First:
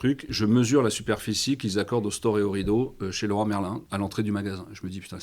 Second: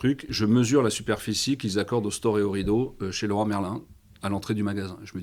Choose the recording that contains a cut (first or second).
first